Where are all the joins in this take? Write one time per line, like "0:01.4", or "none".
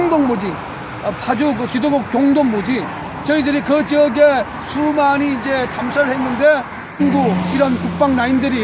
none